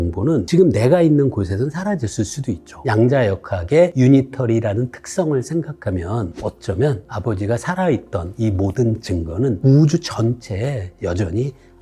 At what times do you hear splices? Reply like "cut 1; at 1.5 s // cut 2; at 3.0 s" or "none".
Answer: cut 1; at 2.7 s // cut 2; at 3.9 s // cut 3; at 6.3 s